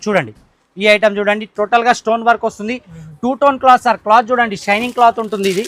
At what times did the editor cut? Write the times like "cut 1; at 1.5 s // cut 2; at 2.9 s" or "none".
none